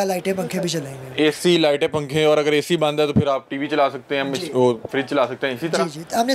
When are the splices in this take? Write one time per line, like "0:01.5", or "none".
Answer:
none

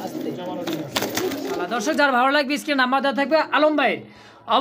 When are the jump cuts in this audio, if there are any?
0:01.6

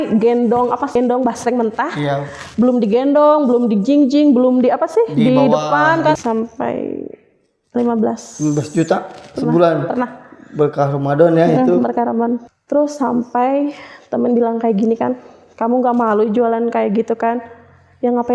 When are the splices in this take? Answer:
0:01.0
0:06.2
0:12.4

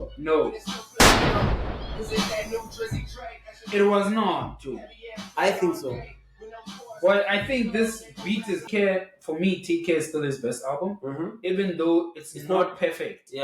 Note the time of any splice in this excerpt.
0:08.6

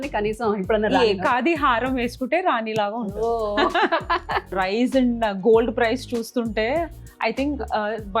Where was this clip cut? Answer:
0:04.5

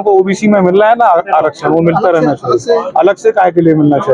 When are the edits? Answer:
none

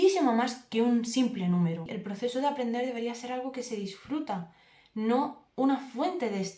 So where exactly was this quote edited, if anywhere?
0:01.9

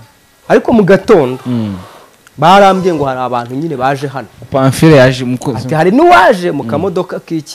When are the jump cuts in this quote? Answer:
none

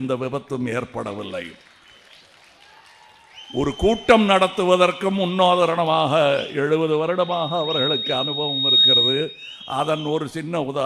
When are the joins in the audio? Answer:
none

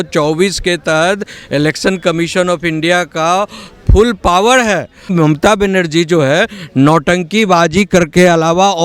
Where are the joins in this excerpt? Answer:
0:05.1

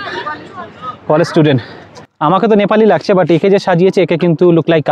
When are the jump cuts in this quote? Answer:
0:02.0

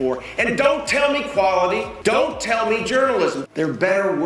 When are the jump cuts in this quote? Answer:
0:01.9
0:03.4

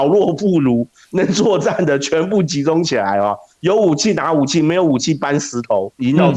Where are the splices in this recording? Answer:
none

